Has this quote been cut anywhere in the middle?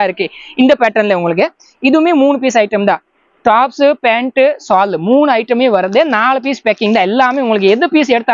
no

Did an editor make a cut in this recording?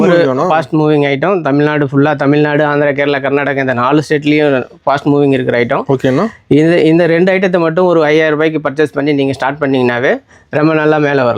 no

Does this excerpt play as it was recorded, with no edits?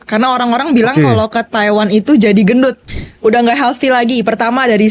no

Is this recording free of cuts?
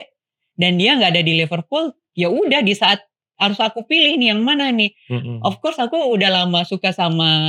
yes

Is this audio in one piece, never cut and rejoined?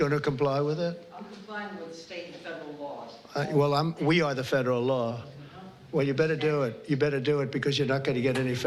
yes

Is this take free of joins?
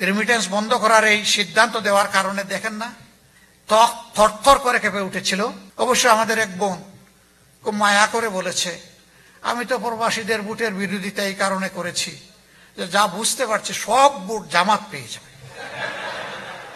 no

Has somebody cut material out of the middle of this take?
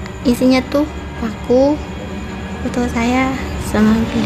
no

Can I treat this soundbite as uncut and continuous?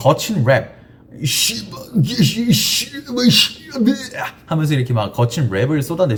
yes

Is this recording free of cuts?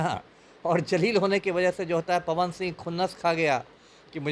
yes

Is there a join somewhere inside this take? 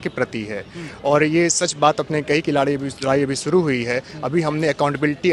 no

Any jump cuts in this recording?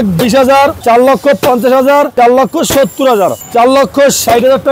yes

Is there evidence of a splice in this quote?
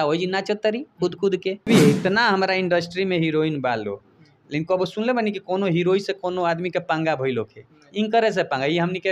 yes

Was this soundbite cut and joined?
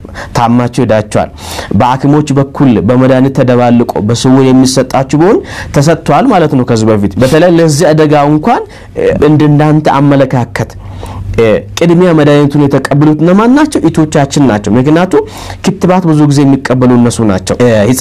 no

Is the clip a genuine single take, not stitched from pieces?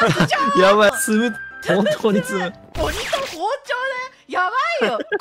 no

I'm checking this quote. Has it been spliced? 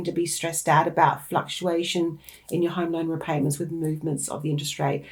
no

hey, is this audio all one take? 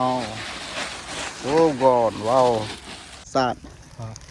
no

